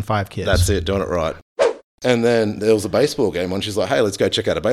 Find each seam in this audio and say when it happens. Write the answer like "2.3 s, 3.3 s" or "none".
1.8 s